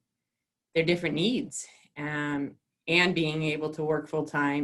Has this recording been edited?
no; 0 cuts

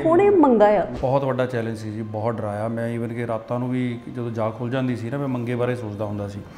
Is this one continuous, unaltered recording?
no; 1 cut; at 0.9 s

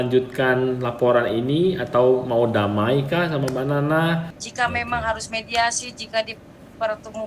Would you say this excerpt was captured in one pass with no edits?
no; 1 cut; at 4.4 s

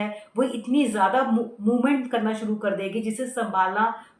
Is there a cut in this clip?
no; 0 cuts

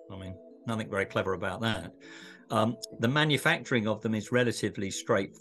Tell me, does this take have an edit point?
no; 0 cuts

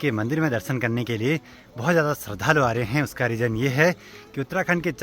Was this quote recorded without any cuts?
yes; 0 cuts

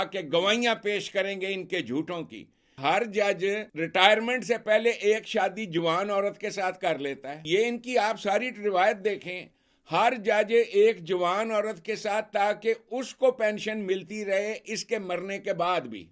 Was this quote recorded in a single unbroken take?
no; 3 cuts; at 2.8 s, 3.7 s, 7.4 s

